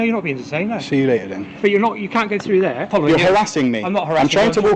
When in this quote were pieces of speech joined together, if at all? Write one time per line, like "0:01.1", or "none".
0:02.9